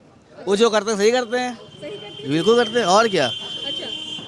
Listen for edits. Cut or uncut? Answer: uncut